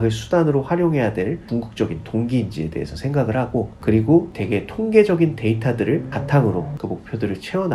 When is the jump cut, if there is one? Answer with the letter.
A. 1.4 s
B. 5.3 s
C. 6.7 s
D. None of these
C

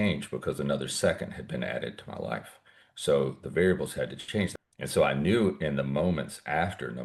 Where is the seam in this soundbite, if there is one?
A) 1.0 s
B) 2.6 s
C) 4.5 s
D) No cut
C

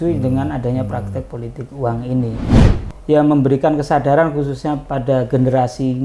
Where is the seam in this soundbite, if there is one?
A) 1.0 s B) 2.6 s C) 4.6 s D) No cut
B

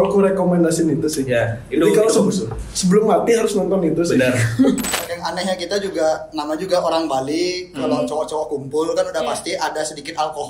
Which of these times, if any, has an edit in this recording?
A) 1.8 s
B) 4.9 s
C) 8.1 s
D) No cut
B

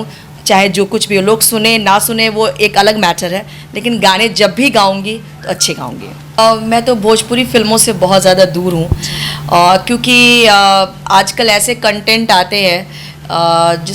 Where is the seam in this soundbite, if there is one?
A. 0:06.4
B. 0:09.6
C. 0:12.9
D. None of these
A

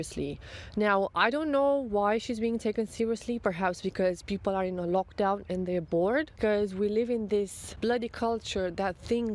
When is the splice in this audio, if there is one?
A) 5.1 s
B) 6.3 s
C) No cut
B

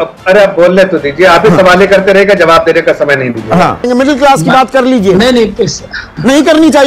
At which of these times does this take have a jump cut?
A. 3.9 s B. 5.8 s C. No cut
A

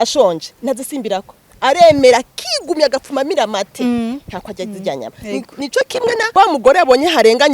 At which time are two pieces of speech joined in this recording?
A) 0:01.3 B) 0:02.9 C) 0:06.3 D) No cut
C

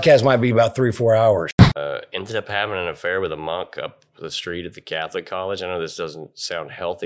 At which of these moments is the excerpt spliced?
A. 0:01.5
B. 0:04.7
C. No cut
A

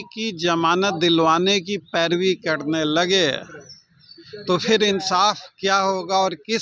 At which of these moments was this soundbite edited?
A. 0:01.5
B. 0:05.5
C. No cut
C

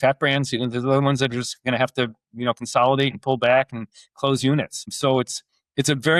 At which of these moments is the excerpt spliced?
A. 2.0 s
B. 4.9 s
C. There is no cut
B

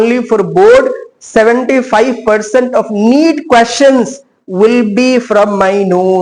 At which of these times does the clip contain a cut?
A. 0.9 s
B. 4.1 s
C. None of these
C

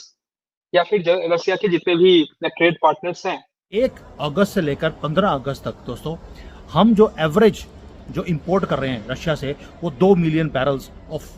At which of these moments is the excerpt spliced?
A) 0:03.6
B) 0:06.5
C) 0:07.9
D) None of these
A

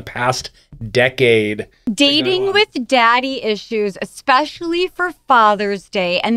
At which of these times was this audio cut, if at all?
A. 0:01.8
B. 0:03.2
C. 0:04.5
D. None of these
A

